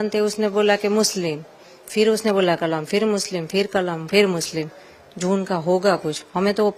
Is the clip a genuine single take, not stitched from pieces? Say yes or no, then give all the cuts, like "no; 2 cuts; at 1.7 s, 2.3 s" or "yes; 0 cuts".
yes; 0 cuts